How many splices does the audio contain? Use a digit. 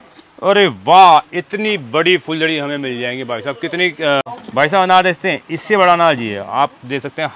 1